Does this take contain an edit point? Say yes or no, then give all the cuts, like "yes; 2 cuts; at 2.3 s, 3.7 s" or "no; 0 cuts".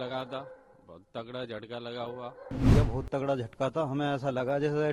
yes; 1 cut; at 2.6 s